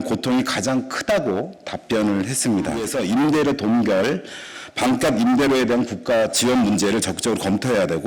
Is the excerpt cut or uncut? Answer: cut